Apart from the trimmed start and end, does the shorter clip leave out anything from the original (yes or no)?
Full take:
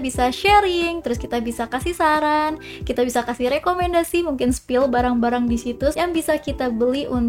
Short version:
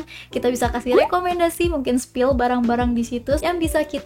no